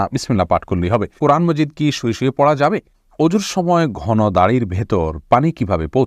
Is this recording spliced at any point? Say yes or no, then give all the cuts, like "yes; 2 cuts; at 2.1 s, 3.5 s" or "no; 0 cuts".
yes; 2 cuts; at 1.1 s, 3.0 s